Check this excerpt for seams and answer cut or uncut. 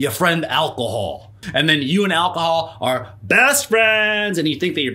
cut